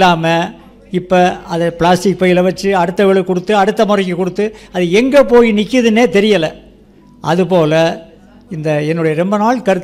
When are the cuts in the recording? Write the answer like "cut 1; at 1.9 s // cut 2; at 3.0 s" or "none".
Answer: none